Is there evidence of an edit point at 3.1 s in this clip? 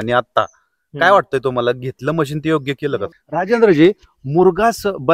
yes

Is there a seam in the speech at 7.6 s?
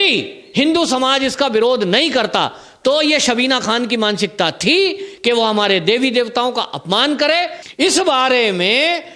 yes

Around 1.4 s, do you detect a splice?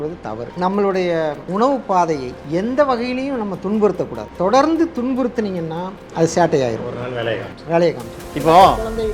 yes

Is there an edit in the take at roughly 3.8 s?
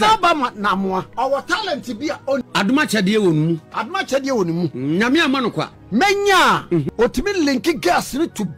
no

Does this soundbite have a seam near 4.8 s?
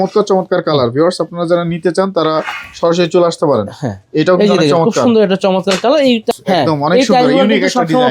no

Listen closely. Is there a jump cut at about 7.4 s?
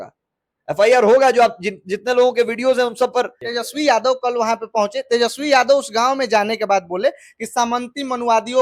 no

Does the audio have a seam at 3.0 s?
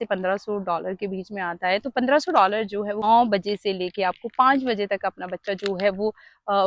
yes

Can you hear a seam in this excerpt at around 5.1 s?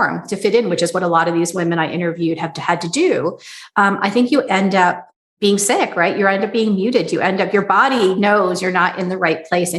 yes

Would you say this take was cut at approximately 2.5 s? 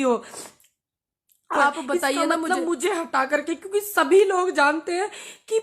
yes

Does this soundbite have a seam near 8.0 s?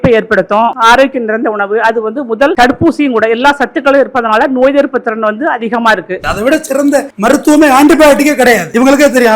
no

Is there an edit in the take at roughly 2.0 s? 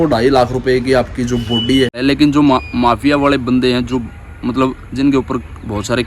yes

